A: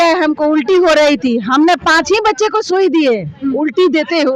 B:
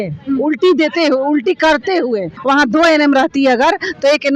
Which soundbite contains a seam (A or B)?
B